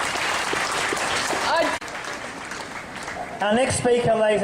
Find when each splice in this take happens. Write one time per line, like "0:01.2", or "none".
none